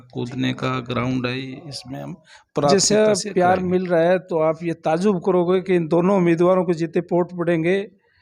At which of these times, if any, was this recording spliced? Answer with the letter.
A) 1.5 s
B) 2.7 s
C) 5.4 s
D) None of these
B